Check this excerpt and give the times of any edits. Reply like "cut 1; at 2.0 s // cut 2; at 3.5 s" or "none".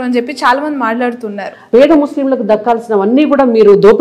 cut 1; at 1.6 s